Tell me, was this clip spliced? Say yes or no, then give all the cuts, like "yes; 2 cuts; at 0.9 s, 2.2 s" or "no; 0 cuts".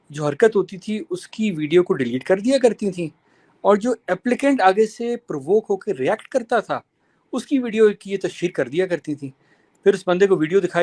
no; 0 cuts